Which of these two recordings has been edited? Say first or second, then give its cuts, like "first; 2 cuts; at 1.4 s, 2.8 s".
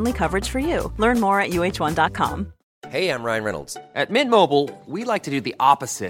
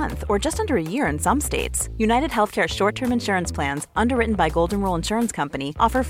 first; 1 cut; at 2.6 s